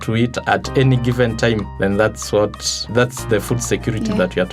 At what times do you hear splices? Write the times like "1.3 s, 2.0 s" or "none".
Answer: 2.8 s